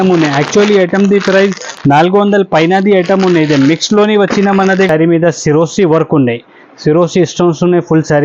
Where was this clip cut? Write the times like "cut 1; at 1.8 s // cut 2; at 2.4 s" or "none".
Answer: cut 1; at 4.9 s